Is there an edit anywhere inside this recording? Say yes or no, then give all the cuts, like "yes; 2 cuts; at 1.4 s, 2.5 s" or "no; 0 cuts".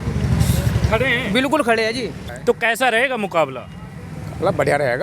yes; 1 cut; at 2.2 s